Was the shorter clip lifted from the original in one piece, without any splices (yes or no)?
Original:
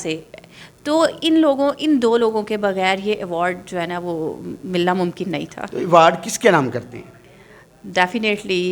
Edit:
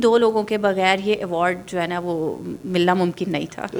yes